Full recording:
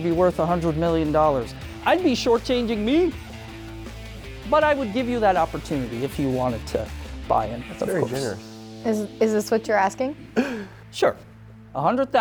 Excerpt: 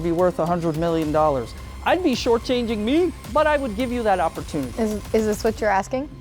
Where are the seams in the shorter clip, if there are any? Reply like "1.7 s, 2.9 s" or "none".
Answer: 3.2 s, 4.7 s

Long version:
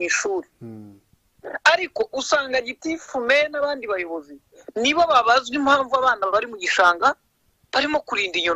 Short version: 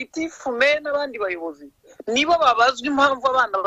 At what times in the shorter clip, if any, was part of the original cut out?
none

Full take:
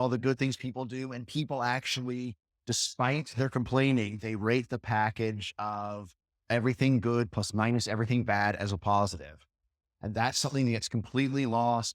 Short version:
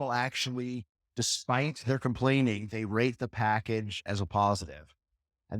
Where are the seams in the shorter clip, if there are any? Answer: 4.1 s

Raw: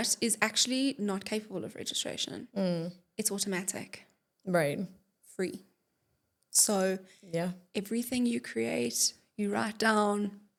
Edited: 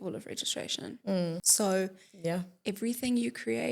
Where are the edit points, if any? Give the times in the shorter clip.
1.5 s

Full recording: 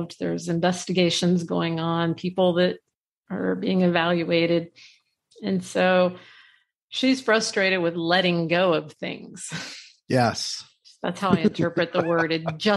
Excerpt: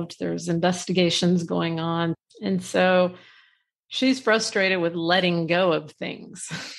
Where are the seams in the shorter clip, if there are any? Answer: 2.2 s

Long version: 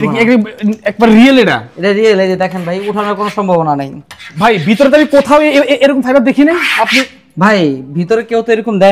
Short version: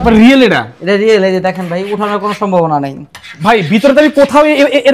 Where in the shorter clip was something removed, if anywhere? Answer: none

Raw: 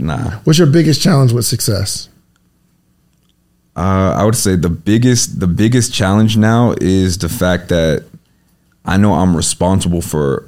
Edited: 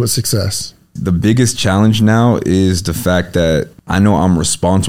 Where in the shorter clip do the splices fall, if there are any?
0.9 s, 3.8 s

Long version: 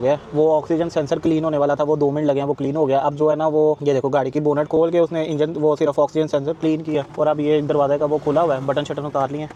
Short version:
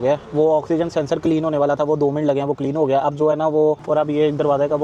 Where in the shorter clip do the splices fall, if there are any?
3.8 s

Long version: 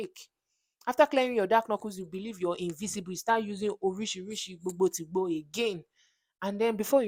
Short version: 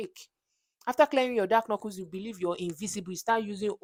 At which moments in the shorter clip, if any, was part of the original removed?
none

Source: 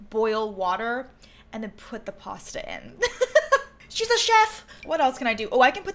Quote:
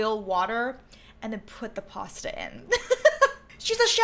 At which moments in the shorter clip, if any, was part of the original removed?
none

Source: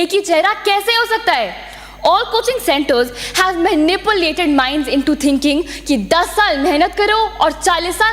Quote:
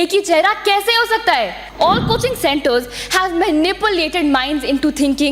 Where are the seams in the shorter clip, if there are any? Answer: 1.6 s

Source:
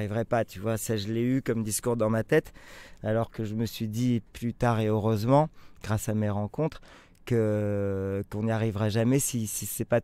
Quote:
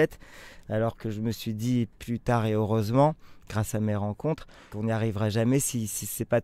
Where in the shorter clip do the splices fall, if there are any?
4.7 s

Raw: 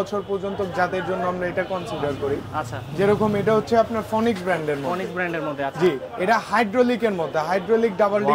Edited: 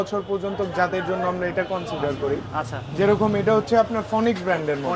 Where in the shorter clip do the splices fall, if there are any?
none

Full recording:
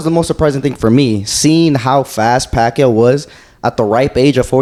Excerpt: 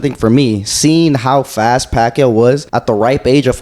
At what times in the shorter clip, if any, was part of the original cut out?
2.7 s

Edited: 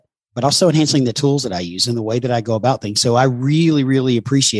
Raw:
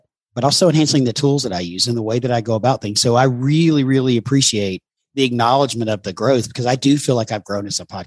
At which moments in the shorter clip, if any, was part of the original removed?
none

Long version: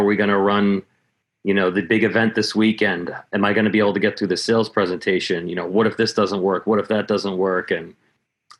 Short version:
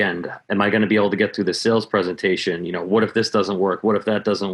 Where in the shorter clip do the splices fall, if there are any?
none

